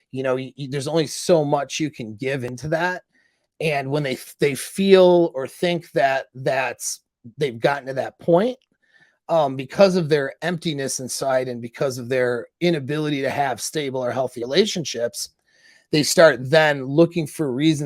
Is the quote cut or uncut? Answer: cut